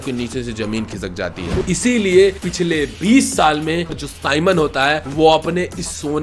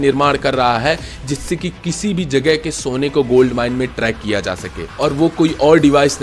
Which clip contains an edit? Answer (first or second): first